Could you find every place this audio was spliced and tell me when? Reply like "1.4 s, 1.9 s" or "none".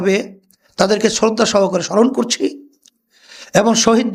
none